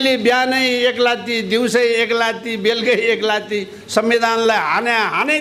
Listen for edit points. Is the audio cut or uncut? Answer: uncut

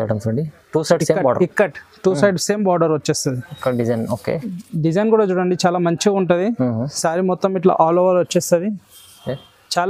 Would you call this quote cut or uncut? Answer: uncut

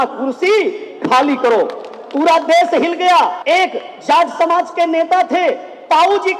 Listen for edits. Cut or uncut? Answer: cut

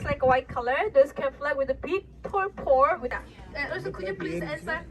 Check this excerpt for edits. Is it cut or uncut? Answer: cut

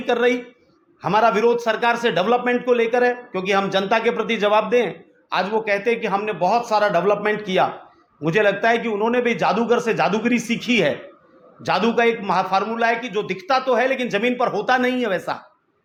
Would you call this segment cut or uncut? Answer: uncut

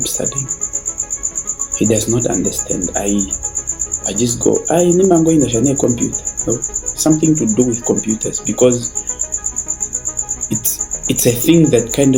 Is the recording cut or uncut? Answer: uncut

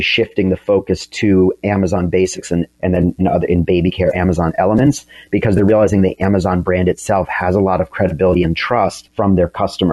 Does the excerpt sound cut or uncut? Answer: cut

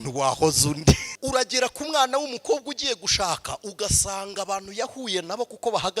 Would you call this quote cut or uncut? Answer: cut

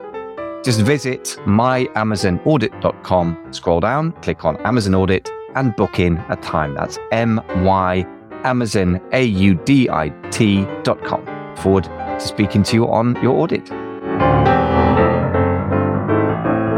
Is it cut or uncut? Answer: cut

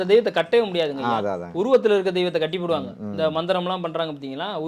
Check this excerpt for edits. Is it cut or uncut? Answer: uncut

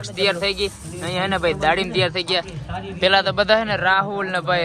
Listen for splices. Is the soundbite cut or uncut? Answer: uncut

